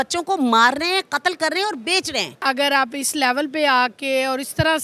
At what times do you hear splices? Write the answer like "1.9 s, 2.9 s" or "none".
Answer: 2.4 s